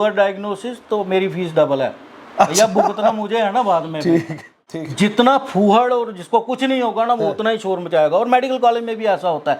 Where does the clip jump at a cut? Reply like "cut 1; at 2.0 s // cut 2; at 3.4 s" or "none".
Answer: cut 1; at 4.8 s